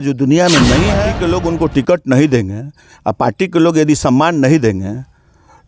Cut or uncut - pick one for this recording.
cut